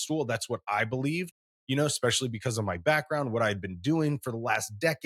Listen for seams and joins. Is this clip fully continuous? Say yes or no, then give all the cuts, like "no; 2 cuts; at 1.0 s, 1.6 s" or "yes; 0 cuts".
yes; 0 cuts